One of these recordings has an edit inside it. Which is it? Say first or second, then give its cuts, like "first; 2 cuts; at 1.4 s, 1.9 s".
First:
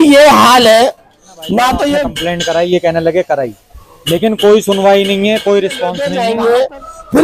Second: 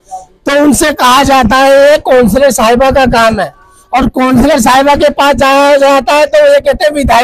first; 2 cuts; at 2.2 s, 6.1 s